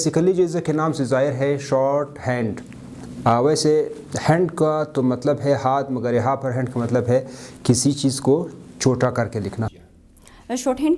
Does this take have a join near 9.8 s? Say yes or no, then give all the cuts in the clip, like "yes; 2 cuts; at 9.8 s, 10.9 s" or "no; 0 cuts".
yes; 1 cut; at 9.8 s